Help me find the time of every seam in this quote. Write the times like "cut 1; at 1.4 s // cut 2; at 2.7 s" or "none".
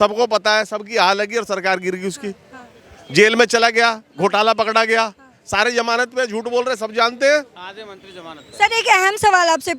none